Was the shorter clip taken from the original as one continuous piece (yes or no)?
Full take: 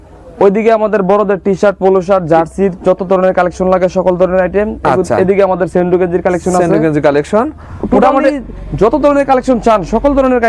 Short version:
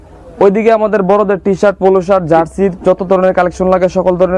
yes